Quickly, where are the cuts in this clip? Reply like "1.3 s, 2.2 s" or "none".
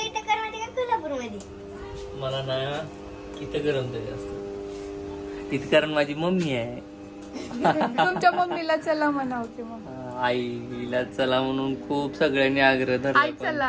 none